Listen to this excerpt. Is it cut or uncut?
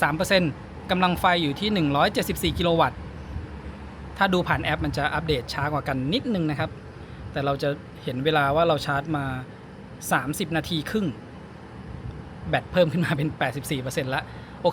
uncut